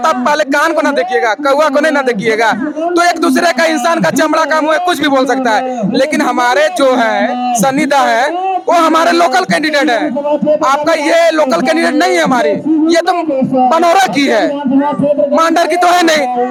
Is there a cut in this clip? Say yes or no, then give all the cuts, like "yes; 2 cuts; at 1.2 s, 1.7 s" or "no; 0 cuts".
no; 0 cuts